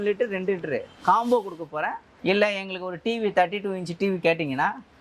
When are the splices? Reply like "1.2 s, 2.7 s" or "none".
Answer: 2.0 s